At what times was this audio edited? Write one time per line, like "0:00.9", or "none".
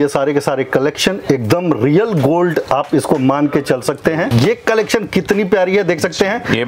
0:04.3